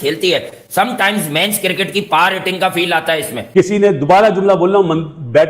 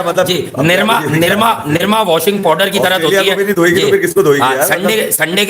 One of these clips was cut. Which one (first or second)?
first